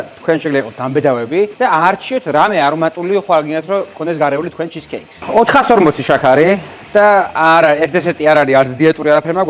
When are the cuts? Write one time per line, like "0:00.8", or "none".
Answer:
0:01.5
0:05.1